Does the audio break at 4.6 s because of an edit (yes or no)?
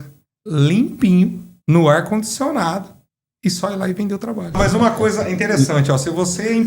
yes